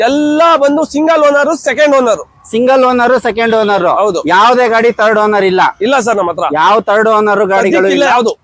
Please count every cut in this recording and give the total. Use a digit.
0